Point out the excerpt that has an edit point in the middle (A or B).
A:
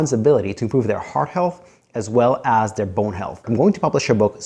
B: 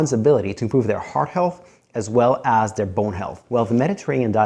A